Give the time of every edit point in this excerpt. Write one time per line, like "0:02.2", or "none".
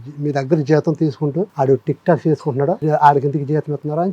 0:01.5
0:02.8

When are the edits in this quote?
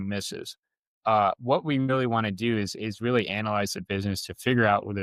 none

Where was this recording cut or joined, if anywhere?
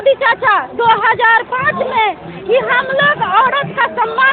none

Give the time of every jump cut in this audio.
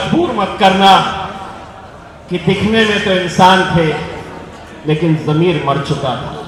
none

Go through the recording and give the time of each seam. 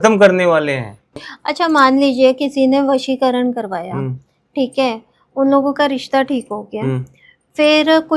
none

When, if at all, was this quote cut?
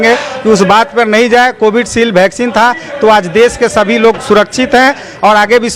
none

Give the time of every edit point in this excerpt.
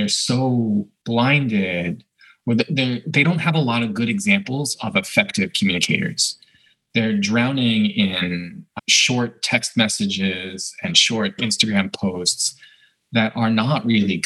none

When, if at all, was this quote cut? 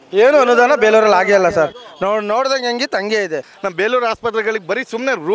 0:03.5

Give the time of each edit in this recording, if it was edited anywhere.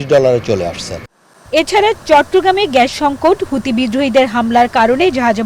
none

